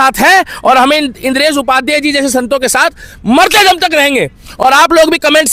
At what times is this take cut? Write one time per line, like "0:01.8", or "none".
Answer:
none